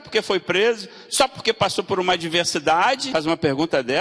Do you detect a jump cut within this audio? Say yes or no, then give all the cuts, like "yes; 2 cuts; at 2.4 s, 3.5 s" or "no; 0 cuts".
yes; 1 cut; at 3.0 s